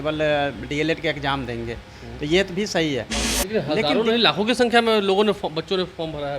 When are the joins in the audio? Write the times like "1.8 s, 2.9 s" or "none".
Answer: 3.2 s